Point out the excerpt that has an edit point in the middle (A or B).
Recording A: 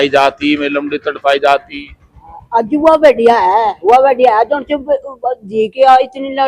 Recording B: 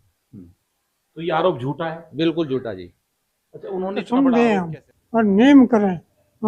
B